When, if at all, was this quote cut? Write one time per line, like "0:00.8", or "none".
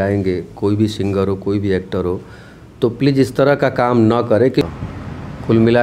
0:04.6